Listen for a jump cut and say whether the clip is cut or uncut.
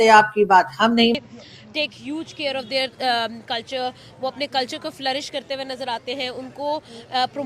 cut